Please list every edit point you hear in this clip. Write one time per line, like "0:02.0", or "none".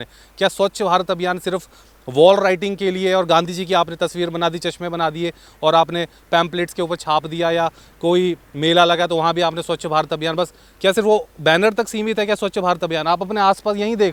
none